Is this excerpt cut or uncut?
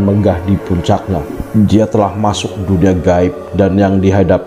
cut